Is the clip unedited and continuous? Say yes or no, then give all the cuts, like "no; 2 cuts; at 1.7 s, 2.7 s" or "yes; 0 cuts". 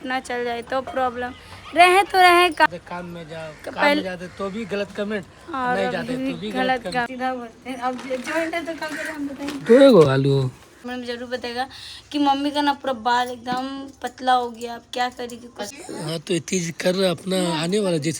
no; 4 cuts; at 2.7 s, 7.1 s, 10.8 s, 15.7 s